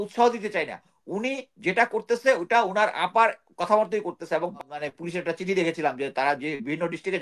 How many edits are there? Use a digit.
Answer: 1